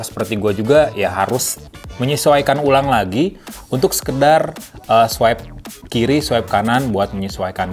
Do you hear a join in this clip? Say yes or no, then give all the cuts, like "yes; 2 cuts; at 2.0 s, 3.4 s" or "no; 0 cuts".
no; 0 cuts